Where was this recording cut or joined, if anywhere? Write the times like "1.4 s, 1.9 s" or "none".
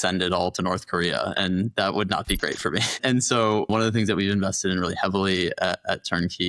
3.7 s